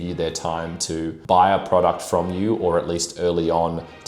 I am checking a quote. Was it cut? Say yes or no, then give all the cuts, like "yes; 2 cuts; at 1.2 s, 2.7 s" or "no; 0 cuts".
yes; 1 cut; at 1.2 s